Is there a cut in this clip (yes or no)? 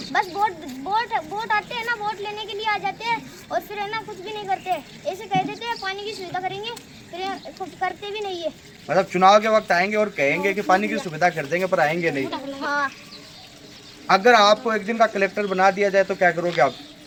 no